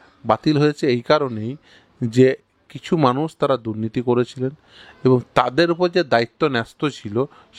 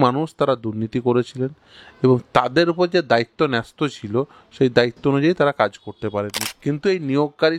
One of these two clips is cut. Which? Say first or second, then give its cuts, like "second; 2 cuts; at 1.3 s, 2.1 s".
second; 1 cut; at 6.4 s